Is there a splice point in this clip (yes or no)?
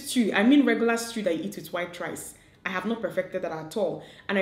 no